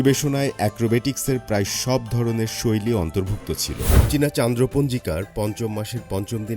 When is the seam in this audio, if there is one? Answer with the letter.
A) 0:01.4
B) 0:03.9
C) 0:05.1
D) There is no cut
B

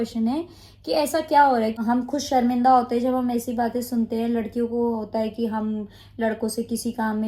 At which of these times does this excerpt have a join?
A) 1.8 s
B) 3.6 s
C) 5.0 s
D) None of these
A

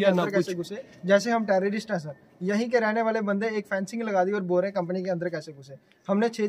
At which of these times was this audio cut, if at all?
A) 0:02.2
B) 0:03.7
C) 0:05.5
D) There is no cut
D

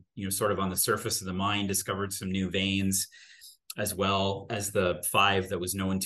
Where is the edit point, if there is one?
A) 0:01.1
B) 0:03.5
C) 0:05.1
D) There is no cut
D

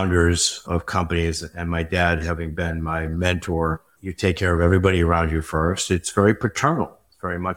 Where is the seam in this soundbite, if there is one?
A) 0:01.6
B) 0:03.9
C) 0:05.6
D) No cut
B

